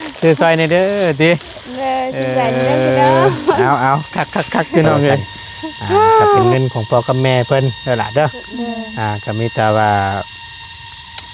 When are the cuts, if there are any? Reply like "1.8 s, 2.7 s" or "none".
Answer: 6.5 s